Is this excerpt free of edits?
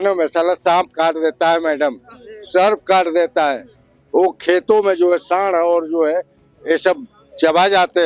yes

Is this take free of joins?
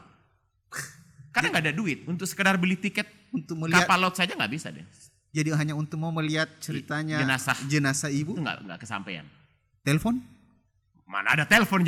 yes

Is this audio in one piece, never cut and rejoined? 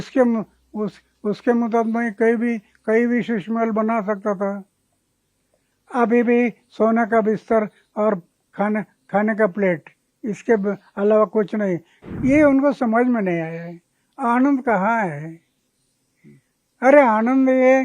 no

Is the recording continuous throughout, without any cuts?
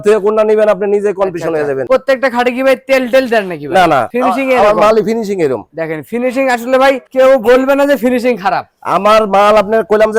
yes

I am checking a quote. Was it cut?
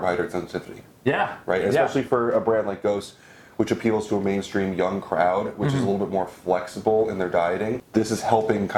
yes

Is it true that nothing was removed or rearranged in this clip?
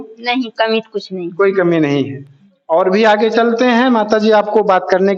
yes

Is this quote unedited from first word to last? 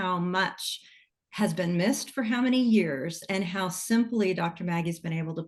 yes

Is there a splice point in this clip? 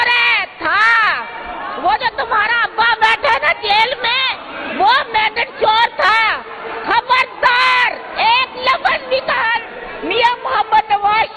no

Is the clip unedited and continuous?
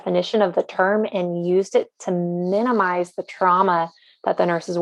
yes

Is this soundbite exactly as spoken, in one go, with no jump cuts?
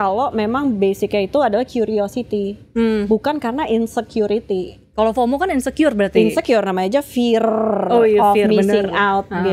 yes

